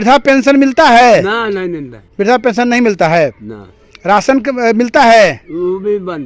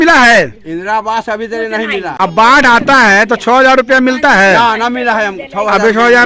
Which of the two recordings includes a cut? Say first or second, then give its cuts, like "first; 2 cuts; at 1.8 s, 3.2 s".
second; 1 cut; at 2.1 s